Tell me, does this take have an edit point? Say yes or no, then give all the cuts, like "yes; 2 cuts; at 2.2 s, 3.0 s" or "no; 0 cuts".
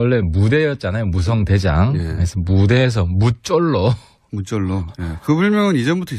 yes; 1 cut; at 5.2 s